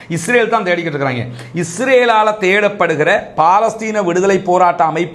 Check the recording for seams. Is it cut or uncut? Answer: uncut